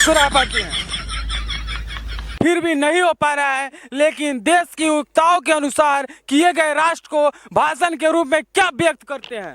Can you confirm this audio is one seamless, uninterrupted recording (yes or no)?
no